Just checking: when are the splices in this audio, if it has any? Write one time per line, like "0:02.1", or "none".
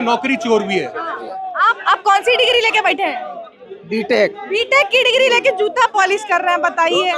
0:01.3